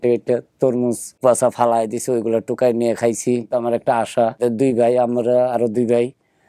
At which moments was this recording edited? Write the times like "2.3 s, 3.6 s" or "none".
1.2 s, 3.5 s, 4.4 s